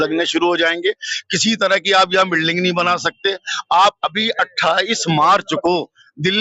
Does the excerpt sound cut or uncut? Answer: uncut